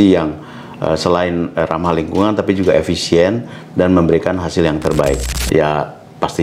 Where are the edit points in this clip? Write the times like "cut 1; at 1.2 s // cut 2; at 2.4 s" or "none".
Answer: cut 1; at 5.3 s